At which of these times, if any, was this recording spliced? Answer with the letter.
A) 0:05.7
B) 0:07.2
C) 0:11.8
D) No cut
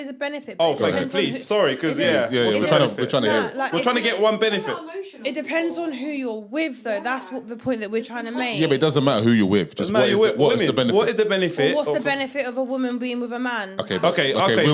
D